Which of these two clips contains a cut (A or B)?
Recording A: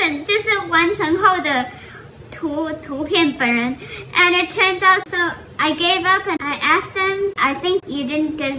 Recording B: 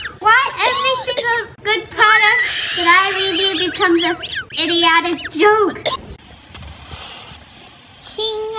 B